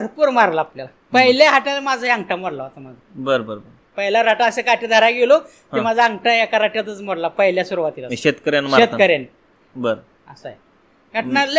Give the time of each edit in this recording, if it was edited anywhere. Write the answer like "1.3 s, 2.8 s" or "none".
none